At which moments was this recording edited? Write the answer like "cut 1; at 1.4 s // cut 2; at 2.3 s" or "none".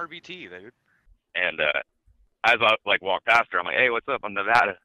none